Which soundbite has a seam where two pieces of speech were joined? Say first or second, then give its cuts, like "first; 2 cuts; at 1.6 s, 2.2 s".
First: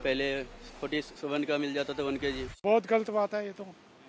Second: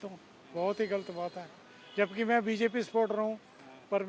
first; 1 cut; at 2.6 s